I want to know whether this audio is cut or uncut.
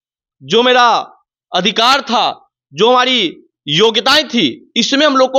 uncut